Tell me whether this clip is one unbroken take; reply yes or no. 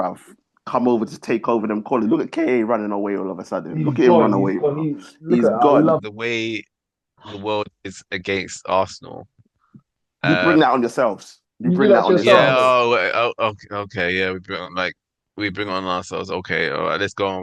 no